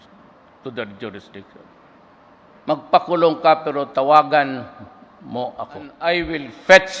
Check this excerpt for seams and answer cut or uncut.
cut